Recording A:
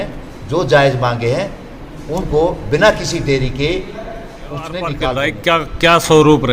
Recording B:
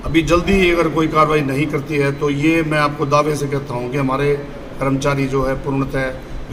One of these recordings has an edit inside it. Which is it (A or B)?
A